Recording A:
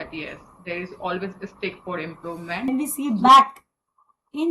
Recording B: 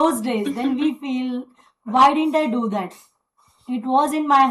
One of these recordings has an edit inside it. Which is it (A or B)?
A